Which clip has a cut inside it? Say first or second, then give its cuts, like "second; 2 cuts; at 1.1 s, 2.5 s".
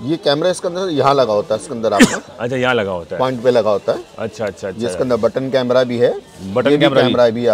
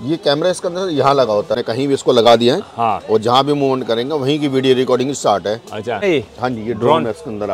second; 2 cuts; at 1.6 s, 6.0 s